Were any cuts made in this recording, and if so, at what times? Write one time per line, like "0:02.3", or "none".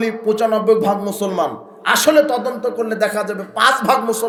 none